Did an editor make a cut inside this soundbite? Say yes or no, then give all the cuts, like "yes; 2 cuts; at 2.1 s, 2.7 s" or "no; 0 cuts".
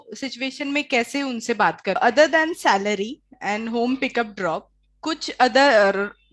yes; 1 cut; at 2.0 s